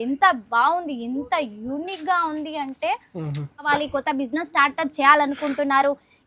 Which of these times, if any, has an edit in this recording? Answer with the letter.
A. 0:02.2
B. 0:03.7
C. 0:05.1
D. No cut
B